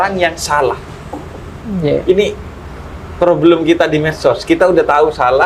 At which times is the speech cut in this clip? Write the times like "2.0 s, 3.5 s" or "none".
none